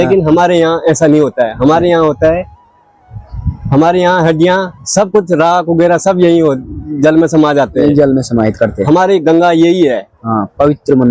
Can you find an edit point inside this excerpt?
no; 0 cuts

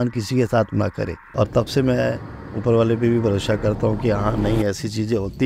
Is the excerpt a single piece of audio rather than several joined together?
no; 1 cut; at 1.3 s

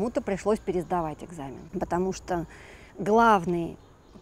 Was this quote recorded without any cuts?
no; 1 cut; at 1.6 s

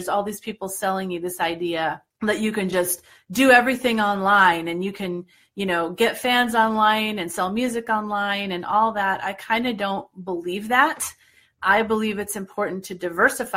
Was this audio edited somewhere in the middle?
yes; 1 cut; at 2.1 s

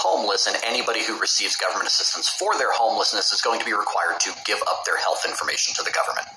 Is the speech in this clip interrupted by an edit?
no; 0 cuts

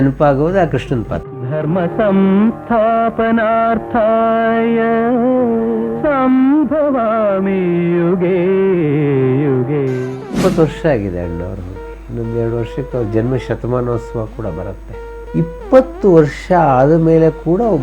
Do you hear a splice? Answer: yes; 2 cuts; at 1.1 s, 10.4 s

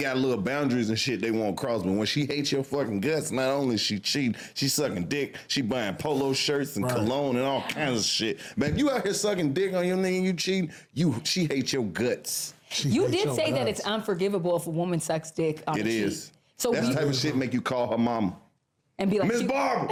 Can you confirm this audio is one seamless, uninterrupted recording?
yes; 0 cuts

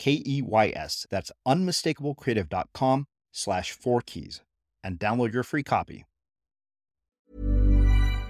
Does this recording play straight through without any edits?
no; 1 cut; at 7.2 s

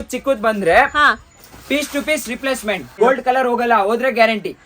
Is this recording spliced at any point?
yes; 1 cut; at 3.0 s

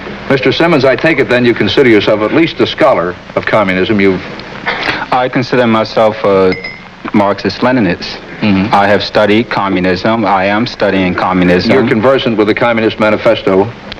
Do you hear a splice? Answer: no; 0 cuts

